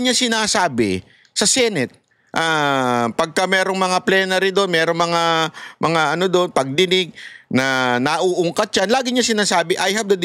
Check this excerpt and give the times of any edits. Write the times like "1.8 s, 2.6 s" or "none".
none